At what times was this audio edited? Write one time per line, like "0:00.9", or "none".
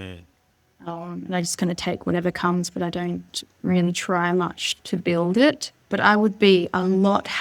0:05.8